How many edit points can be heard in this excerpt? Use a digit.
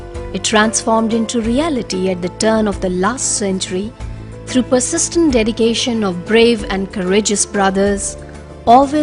0